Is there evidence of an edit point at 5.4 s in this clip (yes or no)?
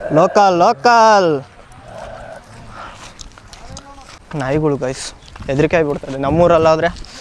no